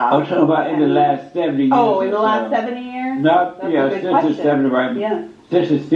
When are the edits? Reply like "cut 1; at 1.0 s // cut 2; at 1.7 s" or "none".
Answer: cut 1; at 1.2 s